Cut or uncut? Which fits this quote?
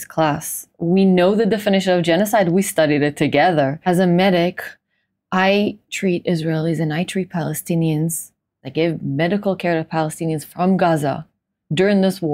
cut